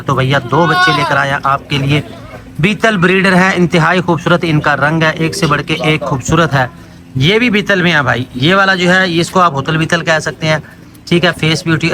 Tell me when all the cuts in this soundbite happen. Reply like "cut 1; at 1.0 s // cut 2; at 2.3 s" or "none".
none